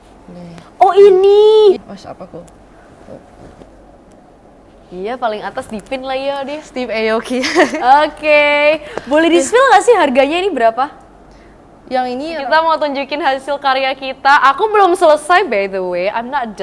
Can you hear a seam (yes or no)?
yes